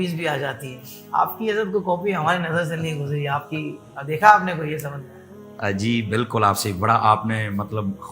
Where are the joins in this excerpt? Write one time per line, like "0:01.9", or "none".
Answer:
none